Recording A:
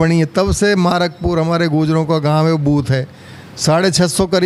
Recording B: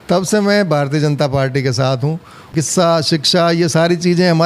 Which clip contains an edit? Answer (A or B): B